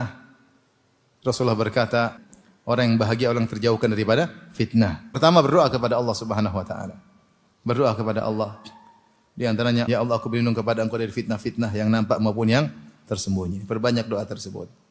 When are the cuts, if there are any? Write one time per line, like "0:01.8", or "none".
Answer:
0:02.2
0:05.1
0:09.9